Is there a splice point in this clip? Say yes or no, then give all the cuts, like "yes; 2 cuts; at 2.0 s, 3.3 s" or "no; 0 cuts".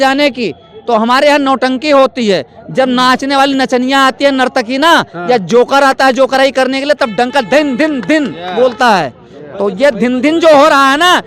no; 0 cuts